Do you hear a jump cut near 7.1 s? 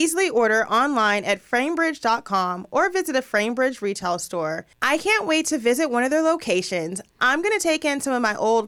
no; 1 cut; at 4.7 s

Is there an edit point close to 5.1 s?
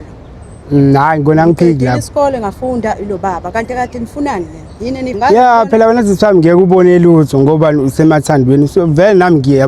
yes; 1 cut; at 5.1 s

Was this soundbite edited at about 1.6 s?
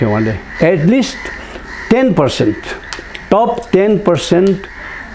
no; 0 cuts

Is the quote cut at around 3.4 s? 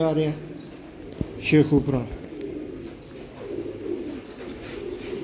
no; 0 cuts

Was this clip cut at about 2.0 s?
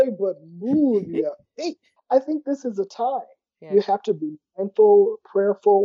yes; 1 cut; at 2.0 s

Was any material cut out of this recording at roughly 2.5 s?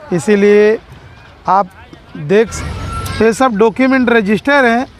yes; 1 cut; at 2.5 s

